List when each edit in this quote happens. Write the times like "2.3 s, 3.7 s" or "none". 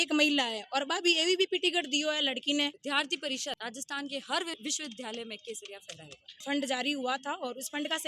2.8 s, 6.4 s